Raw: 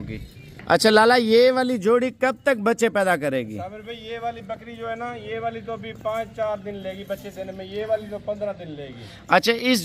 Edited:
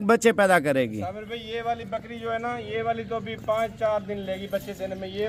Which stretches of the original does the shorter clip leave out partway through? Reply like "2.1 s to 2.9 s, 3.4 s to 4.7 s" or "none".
none